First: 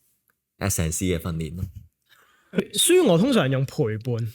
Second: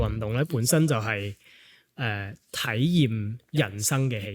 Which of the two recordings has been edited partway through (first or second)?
first